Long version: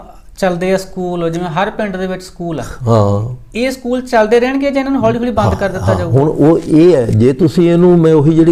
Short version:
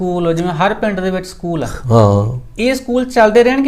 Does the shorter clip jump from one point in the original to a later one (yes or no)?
no